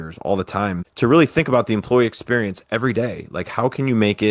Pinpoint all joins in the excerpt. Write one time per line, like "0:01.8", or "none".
none